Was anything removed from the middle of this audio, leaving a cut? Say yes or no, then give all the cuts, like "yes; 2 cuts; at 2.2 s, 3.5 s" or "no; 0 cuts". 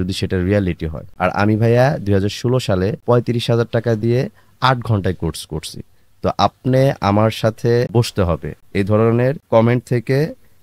yes; 1 cut; at 8.5 s